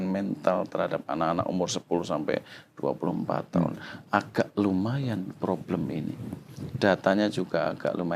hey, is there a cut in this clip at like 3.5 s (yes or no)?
no